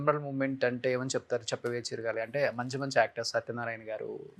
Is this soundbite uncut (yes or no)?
yes